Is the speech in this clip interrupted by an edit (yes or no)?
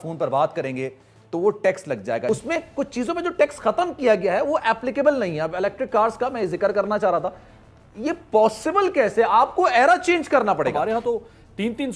no